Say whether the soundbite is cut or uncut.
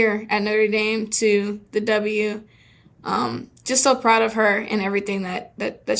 uncut